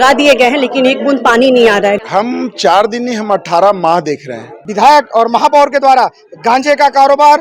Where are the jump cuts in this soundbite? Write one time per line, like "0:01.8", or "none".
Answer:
0:02.0
0:04.6